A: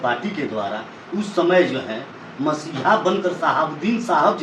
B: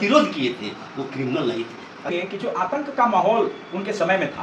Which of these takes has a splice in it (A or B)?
B